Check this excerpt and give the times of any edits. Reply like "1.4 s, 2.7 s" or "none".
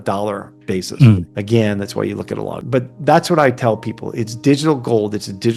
1.3 s, 2.6 s